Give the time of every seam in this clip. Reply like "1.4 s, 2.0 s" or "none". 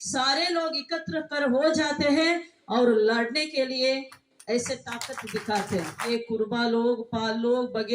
6.1 s